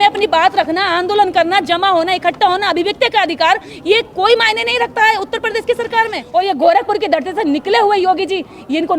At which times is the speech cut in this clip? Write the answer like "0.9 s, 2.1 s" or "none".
6.2 s